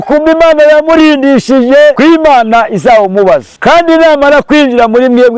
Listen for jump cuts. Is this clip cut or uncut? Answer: cut